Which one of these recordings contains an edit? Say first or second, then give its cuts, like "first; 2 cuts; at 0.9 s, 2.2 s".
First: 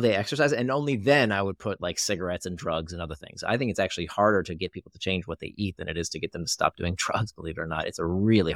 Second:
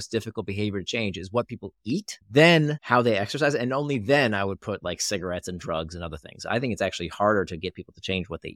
second; 1 cut; at 2.1 s